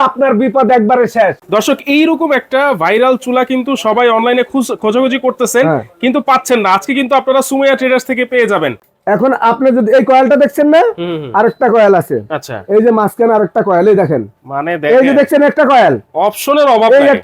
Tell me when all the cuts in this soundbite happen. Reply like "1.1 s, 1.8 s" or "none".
1.4 s, 8.9 s